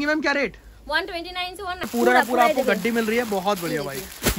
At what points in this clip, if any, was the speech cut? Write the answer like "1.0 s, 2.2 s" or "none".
1.9 s